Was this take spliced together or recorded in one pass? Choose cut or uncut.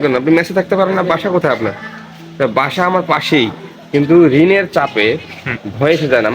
uncut